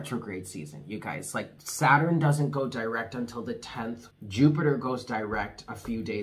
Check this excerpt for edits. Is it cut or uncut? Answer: cut